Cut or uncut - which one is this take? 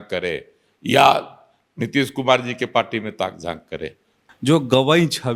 cut